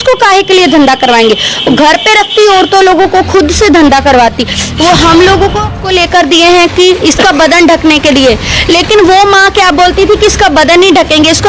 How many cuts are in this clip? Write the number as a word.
one